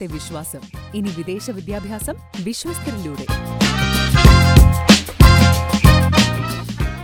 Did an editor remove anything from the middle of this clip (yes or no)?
no